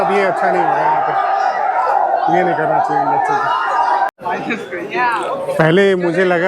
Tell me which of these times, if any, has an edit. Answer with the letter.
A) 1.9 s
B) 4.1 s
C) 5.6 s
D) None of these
B